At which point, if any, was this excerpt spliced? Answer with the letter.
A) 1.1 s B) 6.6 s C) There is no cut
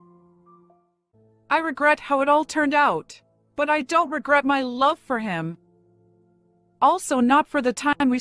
A